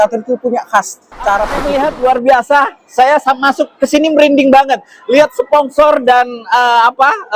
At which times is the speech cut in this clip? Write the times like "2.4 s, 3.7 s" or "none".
1.6 s